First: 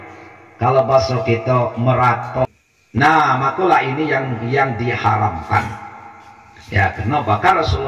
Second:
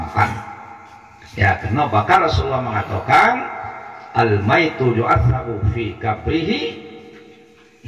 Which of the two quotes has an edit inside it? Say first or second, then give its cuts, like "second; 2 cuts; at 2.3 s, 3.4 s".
first; 1 cut; at 2.5 s